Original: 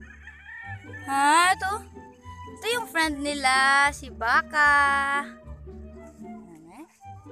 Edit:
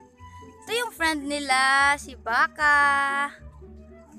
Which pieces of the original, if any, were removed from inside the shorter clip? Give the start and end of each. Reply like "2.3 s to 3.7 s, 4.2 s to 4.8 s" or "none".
5.2 s to 5.3 s